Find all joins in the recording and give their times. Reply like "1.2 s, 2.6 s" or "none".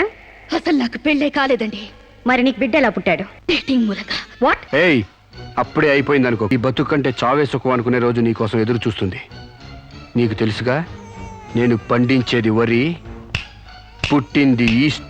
3.3 s, 4.6 s, 6.5 s